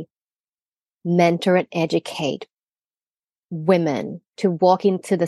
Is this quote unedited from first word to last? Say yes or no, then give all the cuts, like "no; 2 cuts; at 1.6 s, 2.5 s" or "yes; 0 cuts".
no; 1 cut; at 4.2 s